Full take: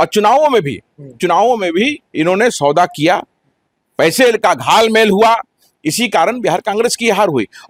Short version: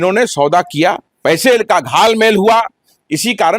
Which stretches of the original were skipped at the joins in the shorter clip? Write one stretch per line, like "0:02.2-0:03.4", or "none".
0:03.3-0:03.8